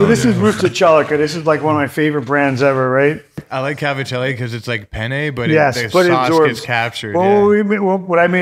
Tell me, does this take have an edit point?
yes; 1 cut; at 3.5 s

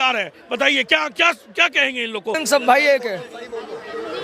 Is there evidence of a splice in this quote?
yes; 1 cut; at 2.4 s

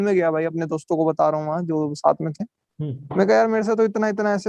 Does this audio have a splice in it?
no; 0 cuts

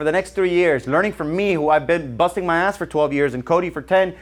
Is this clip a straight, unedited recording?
yes; 0 cuts

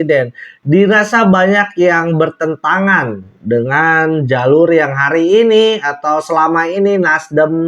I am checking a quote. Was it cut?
no; 0 cuts

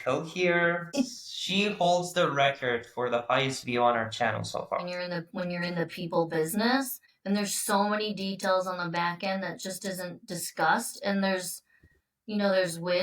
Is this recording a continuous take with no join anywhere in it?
no; 1 cut; at 4.9 s

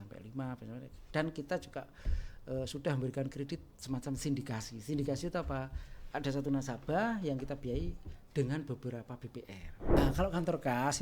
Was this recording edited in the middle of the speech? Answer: yes; 1 cut; at 10.0 s

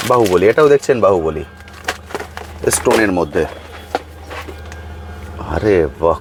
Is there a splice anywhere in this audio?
no; 0 cuts

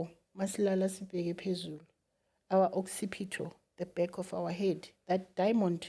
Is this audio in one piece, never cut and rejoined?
yes; 0 cuts

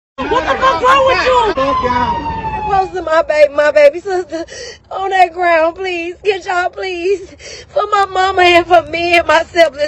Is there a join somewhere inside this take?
yes; 1 cut; at 2.7 s

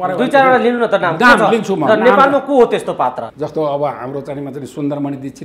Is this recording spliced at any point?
yes; 1 cut; at 3.2 s

